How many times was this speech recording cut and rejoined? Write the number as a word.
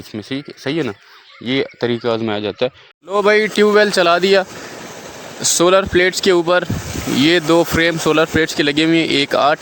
one